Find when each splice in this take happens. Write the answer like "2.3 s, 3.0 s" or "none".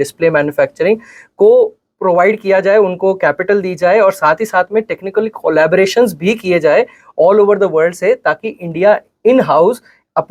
none